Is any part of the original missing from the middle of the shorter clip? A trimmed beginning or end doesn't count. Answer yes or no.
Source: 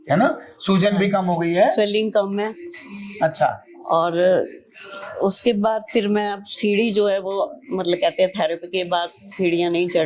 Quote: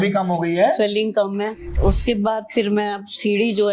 yes